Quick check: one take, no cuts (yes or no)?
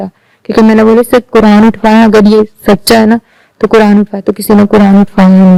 yes